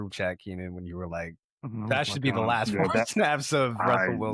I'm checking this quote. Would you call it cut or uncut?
uncut